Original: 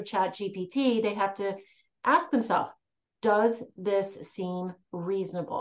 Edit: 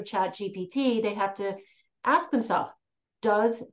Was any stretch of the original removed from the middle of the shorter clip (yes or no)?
no